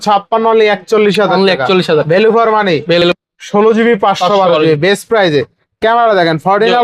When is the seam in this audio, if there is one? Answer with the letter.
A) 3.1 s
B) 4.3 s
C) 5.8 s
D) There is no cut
A